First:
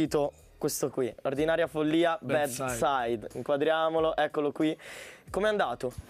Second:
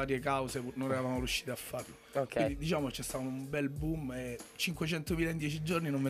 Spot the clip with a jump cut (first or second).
second